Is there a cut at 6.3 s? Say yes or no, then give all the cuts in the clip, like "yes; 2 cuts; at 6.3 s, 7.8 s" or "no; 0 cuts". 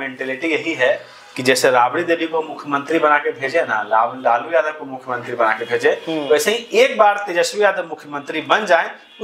no; 0 cuts